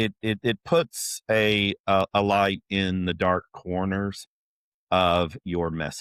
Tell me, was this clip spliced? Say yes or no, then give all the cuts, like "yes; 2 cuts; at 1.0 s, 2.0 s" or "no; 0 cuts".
no; 0 cuts